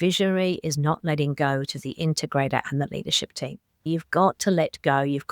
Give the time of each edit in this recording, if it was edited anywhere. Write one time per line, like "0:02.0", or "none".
0:03.8